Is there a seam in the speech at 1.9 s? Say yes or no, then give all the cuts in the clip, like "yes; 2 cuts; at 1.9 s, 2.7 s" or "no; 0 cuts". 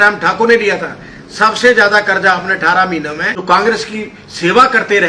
no; 1 cut; at 3.3 s